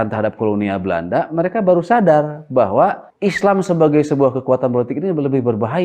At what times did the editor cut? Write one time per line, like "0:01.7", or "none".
0:03.1